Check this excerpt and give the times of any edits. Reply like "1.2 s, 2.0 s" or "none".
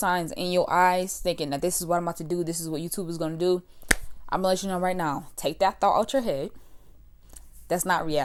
none